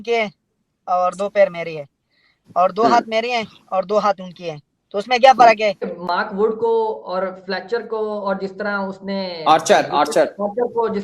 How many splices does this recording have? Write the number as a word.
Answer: one